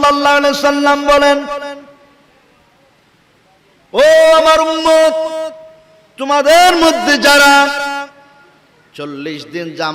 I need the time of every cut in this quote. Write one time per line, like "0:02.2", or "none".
none